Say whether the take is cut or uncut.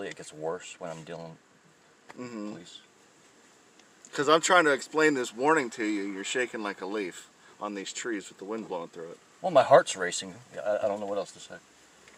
uncut